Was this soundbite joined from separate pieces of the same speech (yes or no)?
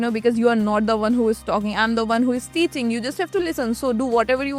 no